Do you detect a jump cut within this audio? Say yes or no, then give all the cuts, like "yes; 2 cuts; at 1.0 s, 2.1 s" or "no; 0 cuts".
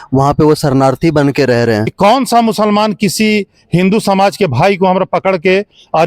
yes; 1 cut; at 1.9 s